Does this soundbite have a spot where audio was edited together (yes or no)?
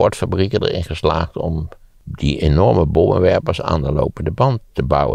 yes